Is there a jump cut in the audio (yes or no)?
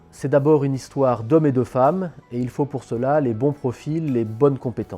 yes